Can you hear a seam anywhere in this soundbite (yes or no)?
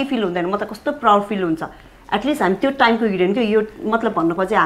no